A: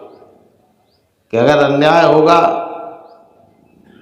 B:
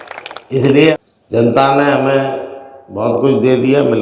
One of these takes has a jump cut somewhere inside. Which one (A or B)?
B